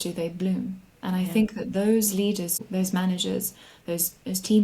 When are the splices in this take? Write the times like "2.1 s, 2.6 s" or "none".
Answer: 2.6 s